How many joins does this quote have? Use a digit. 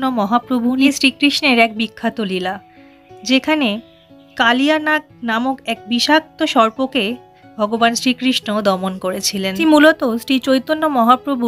2